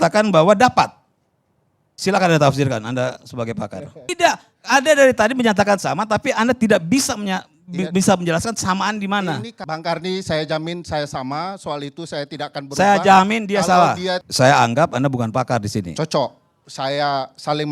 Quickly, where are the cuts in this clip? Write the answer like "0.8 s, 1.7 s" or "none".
4.1 s, 9.6 s, 14.2 s